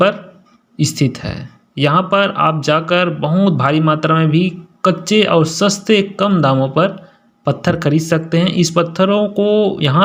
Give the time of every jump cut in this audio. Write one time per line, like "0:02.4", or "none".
none